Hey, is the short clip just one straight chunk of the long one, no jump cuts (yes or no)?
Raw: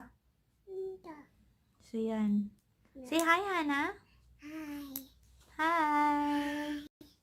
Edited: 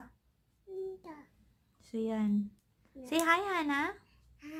yes